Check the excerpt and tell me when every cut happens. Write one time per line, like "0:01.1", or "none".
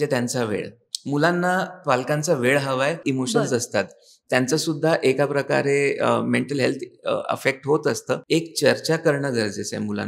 0:03.0
0:08.2